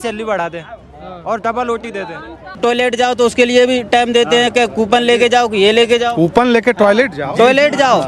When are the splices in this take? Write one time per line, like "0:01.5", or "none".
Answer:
0:02.5